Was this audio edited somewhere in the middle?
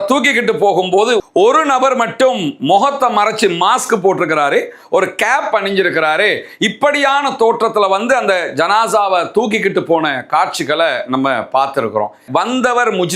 yes; 1 cut; at 12.2 s

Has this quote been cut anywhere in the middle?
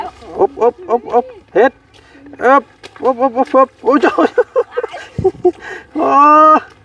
no; 0 cuts

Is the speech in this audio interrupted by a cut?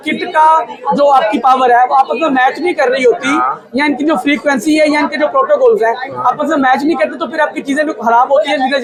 no; 0 cuts

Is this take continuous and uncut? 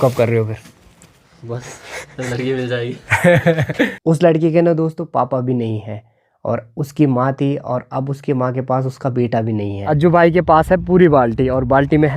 no; 2 cuts; at 4.0 s, 9.9 s

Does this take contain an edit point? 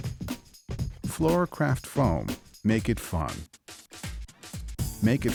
no; 0 cuts

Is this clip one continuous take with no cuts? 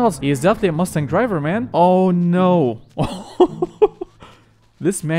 no; 1 cut; at 1.6 s

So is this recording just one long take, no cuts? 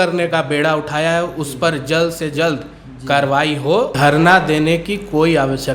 no; 1 cut; at 3.9 s

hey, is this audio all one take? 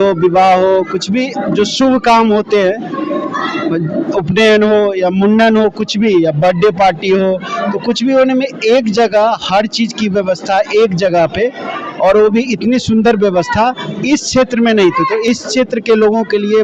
yes; 0 cuts

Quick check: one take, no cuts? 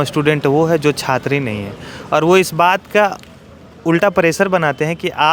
yes; 0 cuts

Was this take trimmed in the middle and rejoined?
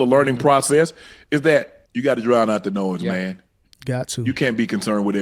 yes; 1 cut; at 1.8 s

